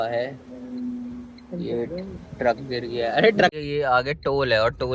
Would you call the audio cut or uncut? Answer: cut